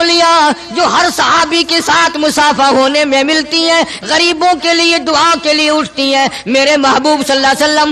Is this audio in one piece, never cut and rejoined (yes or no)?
yes